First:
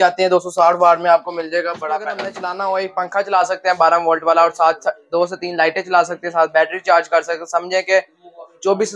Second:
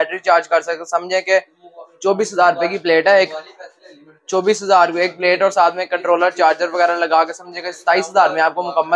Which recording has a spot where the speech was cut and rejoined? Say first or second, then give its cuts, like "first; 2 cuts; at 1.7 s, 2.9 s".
first; 1 cut; at 2.3 s